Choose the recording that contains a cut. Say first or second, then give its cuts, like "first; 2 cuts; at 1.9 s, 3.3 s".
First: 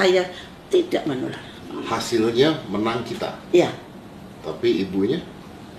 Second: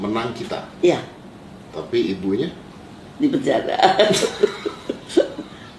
first; 1 cut; at 1.7 s